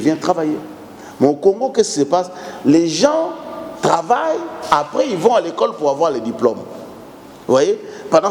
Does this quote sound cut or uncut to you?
uncut